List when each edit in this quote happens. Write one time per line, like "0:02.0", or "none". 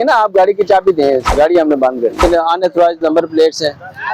0:01.3
0:02.2